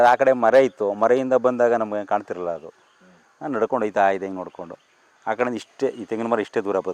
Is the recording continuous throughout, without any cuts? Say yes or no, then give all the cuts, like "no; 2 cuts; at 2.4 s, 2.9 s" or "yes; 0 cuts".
yes; 0 cuts